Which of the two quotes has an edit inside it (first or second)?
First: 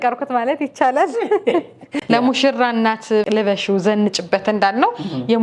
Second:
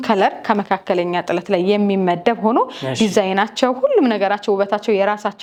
first